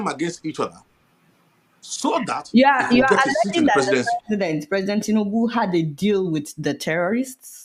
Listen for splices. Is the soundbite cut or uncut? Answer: uncut